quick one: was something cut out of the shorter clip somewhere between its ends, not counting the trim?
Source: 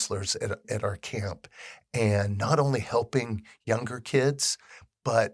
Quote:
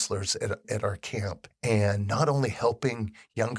yes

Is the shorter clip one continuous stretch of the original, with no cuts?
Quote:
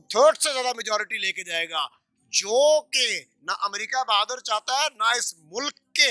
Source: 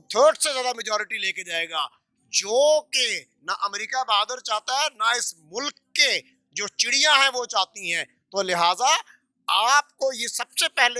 yes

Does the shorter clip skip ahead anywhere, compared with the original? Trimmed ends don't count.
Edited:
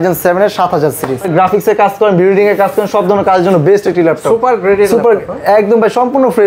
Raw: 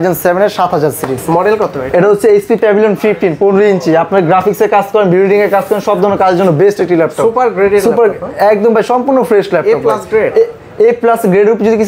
yes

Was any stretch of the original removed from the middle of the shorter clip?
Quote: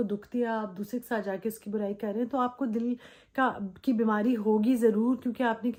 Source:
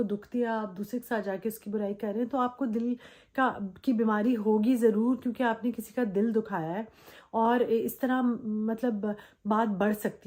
no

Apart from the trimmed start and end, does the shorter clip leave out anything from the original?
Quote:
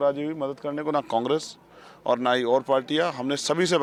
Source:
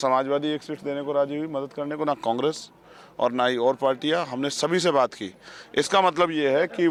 no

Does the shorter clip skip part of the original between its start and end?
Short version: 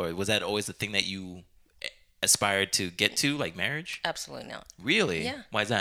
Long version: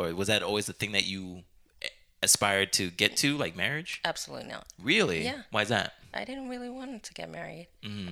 no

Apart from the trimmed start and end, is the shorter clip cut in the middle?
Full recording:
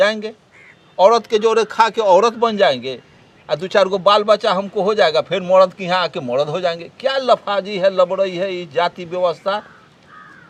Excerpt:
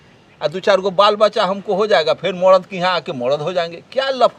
no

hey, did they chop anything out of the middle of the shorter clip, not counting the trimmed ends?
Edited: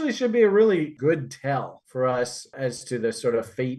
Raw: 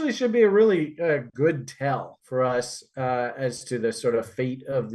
yes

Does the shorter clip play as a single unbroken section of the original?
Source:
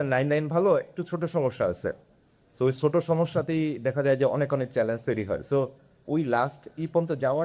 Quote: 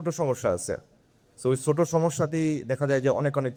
yes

